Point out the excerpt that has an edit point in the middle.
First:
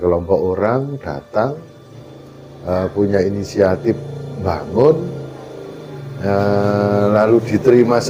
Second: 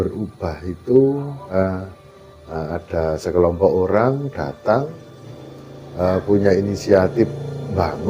second; 1 cut; at 1.6 s

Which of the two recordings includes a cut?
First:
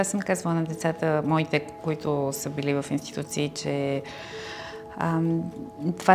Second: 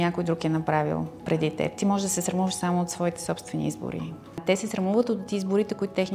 second; 1 cut; at 4.4 s

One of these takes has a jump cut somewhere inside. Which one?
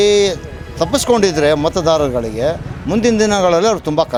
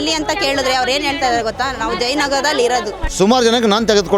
second; 1 cut; at 3.0 s

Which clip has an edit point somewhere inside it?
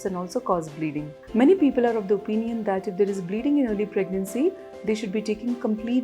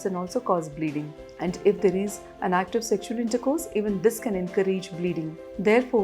first; 1 cut; at 1.2 s

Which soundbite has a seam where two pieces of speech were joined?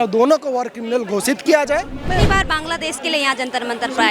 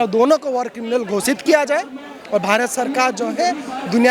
first; 1 cut; at 2.0 s

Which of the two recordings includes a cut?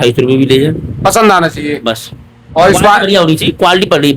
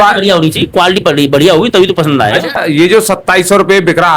second; 1 cut; at 2.6 s

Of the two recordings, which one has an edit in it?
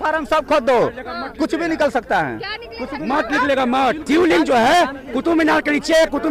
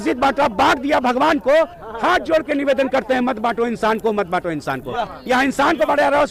first; 1 cut; at 4.0 s

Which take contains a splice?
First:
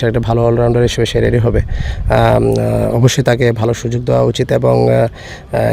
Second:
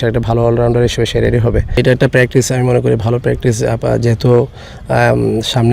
second; 1 cut; at 1.8 s

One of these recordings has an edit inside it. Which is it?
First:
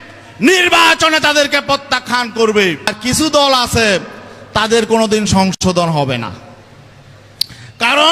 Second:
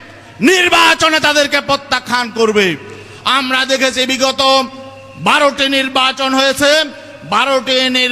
first; 1 cut; at 2.9 s

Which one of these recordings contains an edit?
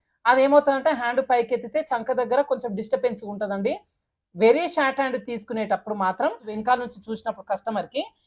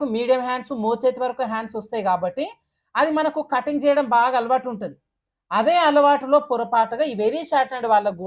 first; 1 cut; at 6.5 s

